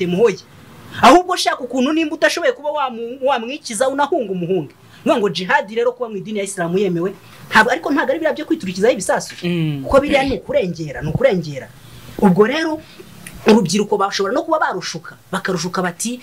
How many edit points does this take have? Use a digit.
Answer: 0